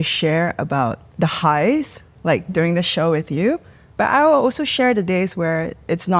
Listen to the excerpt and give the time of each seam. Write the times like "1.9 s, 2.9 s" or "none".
1.0 s